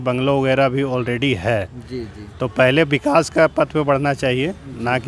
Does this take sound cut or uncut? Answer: uncut